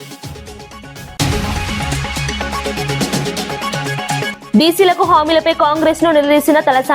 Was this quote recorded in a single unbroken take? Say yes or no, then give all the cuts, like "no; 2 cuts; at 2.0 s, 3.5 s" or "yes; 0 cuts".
yes; 0 cuts